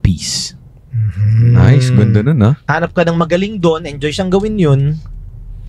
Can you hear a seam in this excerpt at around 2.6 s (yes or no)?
yes